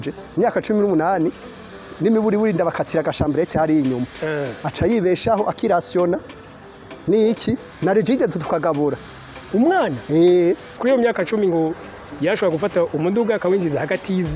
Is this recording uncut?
no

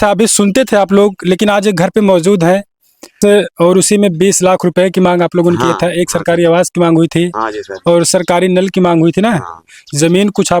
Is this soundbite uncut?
no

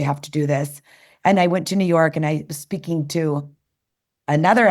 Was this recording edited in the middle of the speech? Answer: no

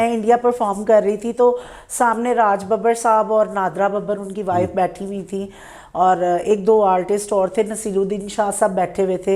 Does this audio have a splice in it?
no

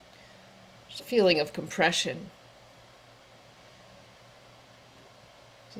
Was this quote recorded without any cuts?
yes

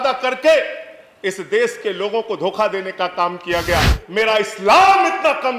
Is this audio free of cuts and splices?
no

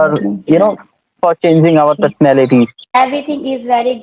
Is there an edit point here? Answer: yes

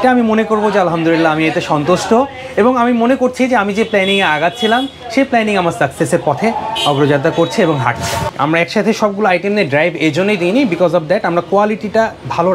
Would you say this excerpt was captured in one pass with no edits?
no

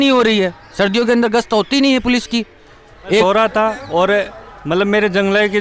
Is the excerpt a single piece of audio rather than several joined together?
no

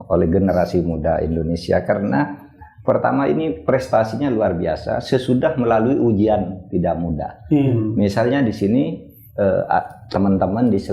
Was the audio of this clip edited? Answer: no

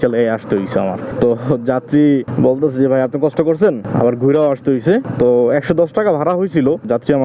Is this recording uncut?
yes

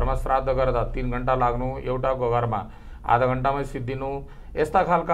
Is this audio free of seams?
yes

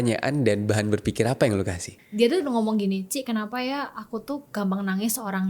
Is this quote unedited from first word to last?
no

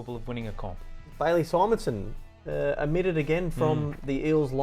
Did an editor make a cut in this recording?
yes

